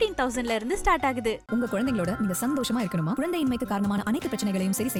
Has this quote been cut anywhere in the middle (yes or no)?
no